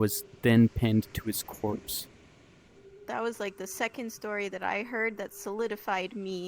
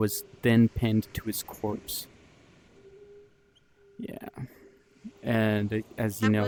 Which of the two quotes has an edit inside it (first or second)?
first